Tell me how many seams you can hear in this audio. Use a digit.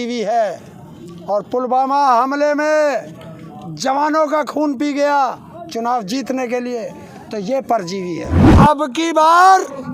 1